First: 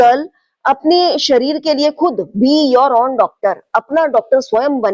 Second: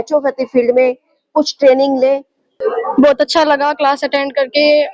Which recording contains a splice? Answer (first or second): second